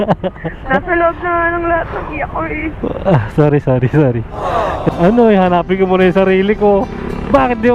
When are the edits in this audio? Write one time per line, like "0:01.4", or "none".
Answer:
0:04.9